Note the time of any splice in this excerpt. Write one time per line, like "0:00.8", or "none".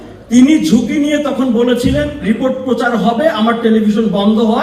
none